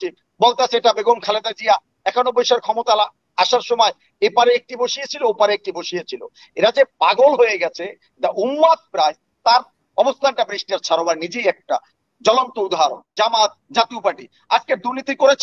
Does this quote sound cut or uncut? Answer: cut